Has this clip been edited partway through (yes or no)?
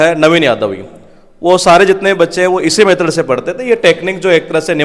no